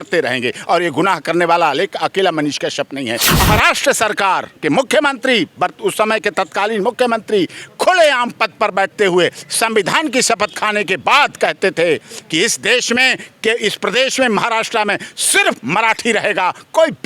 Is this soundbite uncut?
no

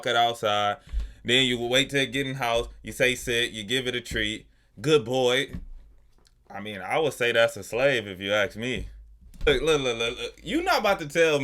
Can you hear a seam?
yes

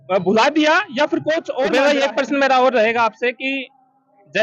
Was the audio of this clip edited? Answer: yes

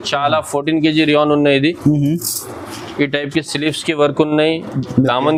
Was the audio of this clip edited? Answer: no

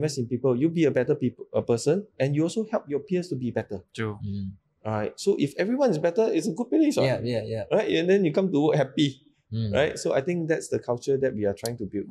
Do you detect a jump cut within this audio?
no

